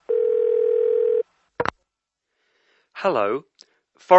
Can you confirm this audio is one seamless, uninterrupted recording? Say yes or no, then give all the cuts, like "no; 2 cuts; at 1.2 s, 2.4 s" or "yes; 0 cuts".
no; 1 cut; at 1.0 s